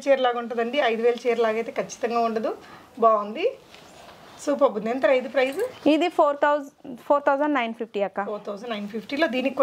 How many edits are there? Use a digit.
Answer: 0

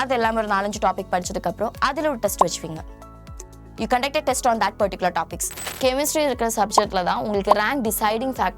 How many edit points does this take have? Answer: 1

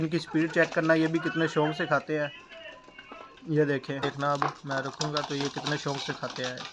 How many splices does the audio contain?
1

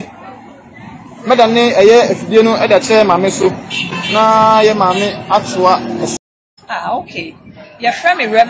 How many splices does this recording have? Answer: 1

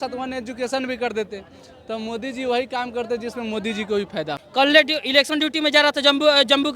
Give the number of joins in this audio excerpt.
1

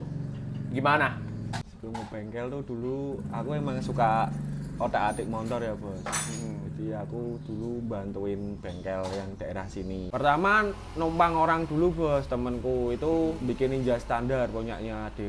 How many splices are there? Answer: 2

